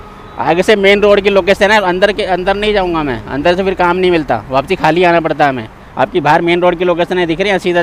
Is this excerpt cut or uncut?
uncut